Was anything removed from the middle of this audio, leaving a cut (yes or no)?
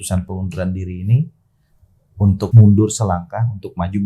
yes